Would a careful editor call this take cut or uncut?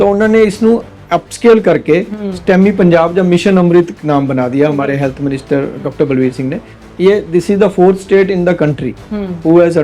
cut